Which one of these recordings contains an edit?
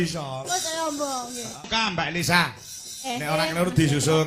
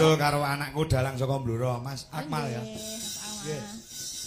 first; 1 cut; at 1.7 s

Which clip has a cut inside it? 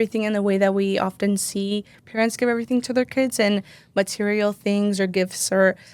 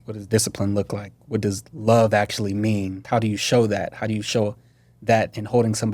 second; 1 cut; at 3.0 s

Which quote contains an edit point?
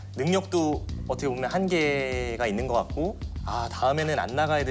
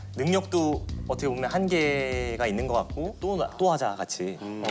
second; 1 cut; at 3.1 s

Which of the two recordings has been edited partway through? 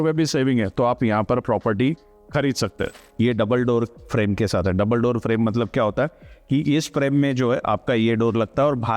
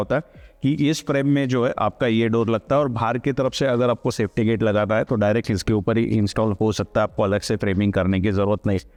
first; 1 cut; at 2.9 s

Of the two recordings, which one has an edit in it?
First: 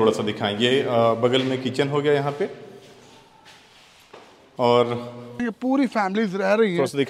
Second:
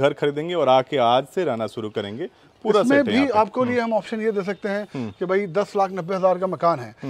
first; 1 cut; at 5.4 s

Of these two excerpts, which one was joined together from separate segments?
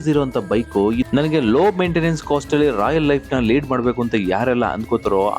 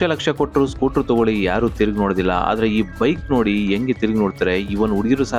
first; 1 cut; at 1.1 s

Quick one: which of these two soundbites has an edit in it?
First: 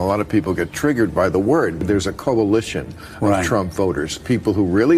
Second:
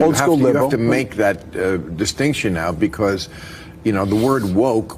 first; 1 cut; at 1.7 s

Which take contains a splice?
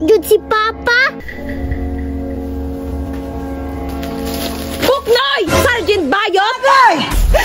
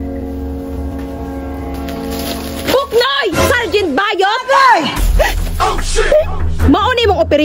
first; 1 cut; at 1.2 s

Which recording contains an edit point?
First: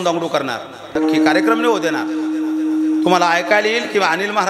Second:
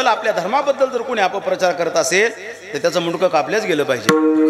first; 1 cut; at 1.0 s

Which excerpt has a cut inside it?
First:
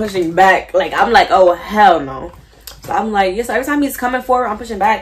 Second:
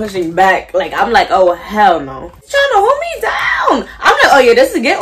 second; 1 cut; at 2.5 s

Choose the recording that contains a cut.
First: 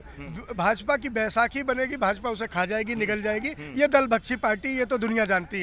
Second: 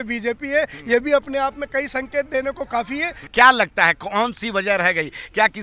second; 1 cut; at 3.3 s

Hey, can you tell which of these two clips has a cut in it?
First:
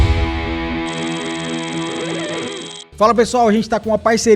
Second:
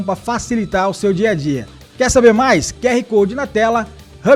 first; 1 cut; at 2.8 s

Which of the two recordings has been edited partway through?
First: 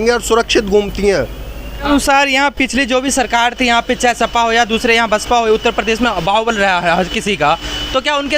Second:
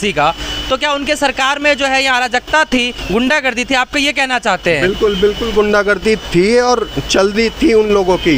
first; 1 cut; at 1.8 s

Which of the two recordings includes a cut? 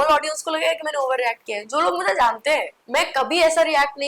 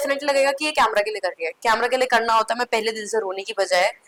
first; 1 cut; at 2.8 s

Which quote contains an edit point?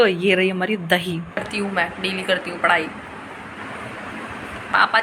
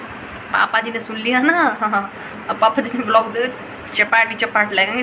first; 1 cut; at 1.4 s

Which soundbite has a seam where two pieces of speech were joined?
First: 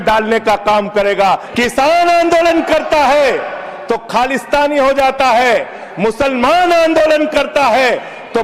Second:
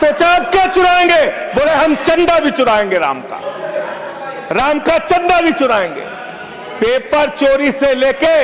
first; 1 cut; at 1.5 s

